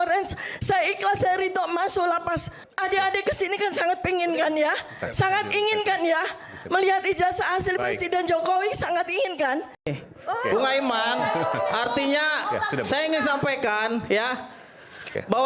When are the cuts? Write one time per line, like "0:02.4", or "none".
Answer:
0:02.6
0:10.0